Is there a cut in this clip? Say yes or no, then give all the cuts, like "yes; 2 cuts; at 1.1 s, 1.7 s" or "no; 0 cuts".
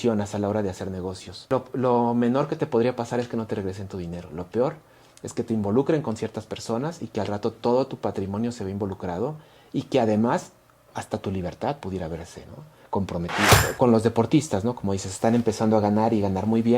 yes; 2 cuts; at 1.3 s, 13.6 s